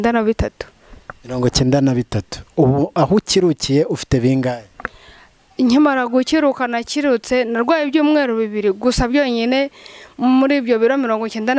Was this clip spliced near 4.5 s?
no; 0 cuts

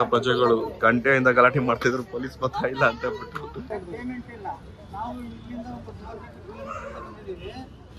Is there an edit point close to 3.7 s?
yes; 1 cut; at 3.7 s

